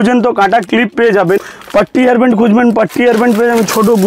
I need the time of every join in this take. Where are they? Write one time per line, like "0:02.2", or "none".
0:01.5